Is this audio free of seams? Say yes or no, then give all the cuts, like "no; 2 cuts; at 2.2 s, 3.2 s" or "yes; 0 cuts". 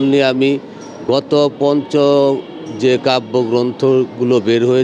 yes; 0 cuts